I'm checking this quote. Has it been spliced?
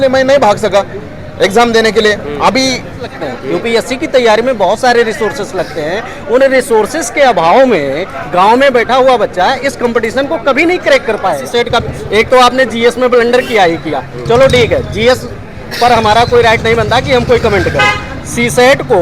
yes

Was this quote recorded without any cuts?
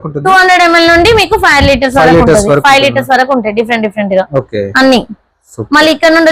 yes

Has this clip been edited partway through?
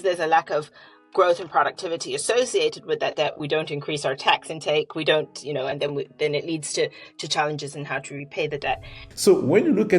yes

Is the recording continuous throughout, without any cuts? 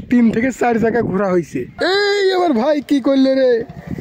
no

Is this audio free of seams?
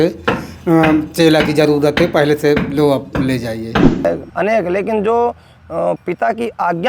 no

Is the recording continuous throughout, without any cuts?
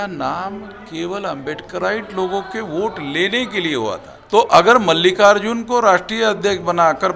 no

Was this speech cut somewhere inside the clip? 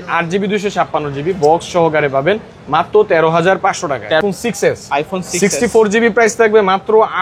yes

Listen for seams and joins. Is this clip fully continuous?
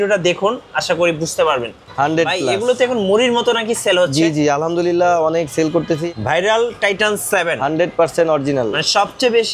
no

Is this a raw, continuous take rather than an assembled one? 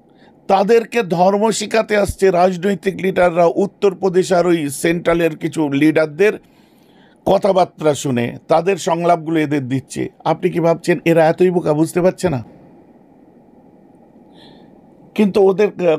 yes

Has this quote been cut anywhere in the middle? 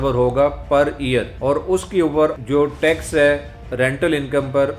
yes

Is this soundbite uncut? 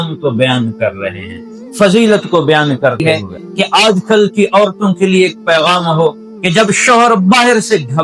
no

